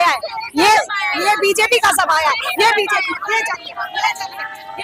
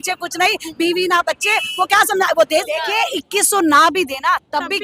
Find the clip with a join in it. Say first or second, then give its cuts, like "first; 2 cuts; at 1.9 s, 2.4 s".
second; 1 cut; at 2.7 s